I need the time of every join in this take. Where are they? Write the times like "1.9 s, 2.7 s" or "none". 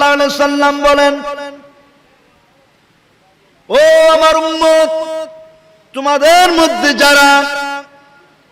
none